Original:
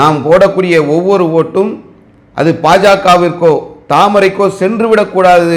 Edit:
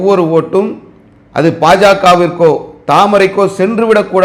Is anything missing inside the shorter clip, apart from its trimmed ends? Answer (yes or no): no